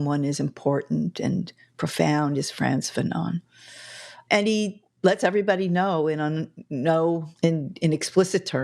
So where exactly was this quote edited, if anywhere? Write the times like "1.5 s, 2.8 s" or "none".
4.2 s, 7.3 s